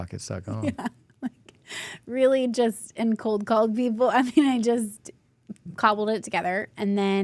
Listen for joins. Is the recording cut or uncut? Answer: uncut